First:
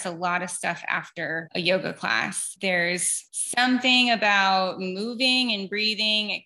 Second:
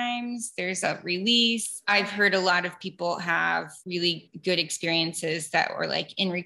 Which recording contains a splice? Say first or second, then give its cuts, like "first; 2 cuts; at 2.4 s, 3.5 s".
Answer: second; 2 cuts; at 1.8 s, 4.1 s